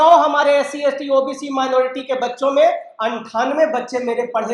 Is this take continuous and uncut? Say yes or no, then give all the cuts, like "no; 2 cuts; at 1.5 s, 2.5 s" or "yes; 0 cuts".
yes; 0 cuts